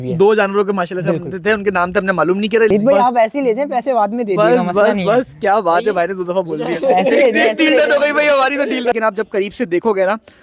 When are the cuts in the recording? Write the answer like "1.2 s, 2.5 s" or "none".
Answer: 2.7 s, 8.9 s